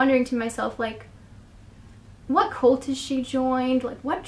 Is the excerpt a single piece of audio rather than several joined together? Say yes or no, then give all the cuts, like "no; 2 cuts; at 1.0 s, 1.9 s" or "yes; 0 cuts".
yes; 0 cuts